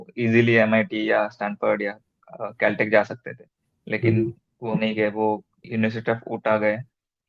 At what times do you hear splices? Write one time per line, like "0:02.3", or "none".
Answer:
0:05.6